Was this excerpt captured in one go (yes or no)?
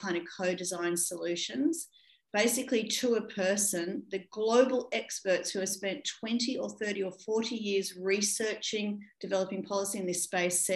yes